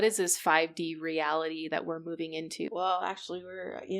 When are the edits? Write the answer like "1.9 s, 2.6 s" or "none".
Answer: 2.7 s